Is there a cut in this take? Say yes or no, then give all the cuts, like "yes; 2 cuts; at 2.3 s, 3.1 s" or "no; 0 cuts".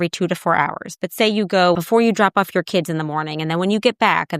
yes; 1 cut; at 1.8 s